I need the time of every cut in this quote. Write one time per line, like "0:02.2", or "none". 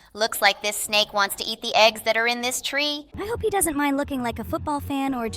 0:03.1